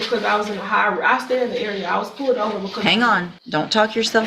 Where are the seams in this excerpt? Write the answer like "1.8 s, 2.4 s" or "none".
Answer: 3.4 s